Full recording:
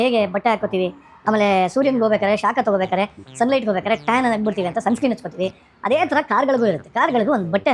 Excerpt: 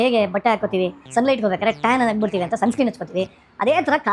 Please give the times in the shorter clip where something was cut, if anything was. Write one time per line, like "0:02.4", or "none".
0:01.0